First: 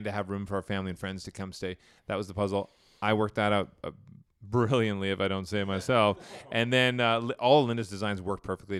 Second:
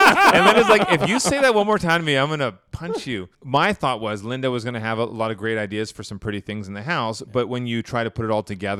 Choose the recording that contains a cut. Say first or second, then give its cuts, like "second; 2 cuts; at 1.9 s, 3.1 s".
second; 1 cut; at 3.3 s